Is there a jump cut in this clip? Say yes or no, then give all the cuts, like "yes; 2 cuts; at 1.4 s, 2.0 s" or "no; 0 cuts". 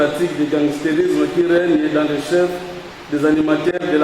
no; 0 cuts